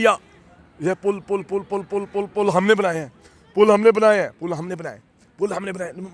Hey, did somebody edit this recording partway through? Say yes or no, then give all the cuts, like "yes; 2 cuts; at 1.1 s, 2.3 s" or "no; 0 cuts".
no; 0 cuts